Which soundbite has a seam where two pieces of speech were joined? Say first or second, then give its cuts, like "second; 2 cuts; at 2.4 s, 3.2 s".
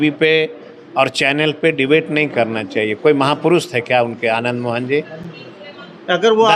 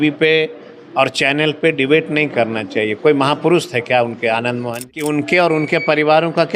second; 1 cut; at 4.8 s